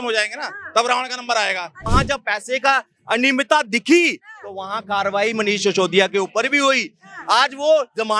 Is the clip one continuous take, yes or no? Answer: no